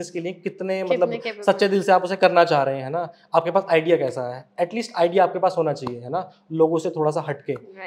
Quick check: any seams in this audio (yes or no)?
no